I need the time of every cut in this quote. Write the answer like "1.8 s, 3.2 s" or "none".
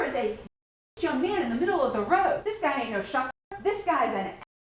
2.4 s, 3.4 s